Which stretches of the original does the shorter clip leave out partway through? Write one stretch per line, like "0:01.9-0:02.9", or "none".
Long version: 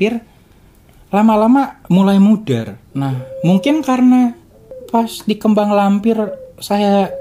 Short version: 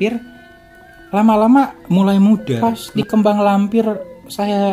0:02.5-0:04.8